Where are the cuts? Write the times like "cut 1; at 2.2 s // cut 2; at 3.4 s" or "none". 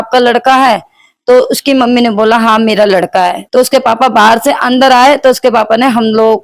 cut 1; at 3.4 s